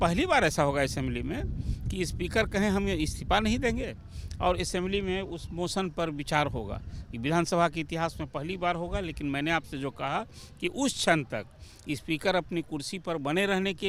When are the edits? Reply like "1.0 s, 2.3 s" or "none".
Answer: none

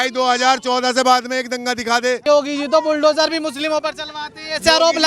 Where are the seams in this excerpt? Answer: 2.2 s

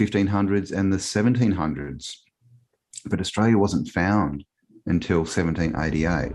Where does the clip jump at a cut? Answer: none

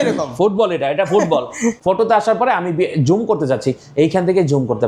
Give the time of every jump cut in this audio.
1.8 s

